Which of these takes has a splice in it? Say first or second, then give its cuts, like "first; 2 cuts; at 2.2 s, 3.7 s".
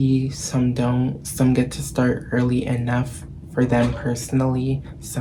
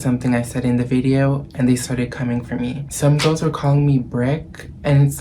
second; 1 cut; at 2.8 s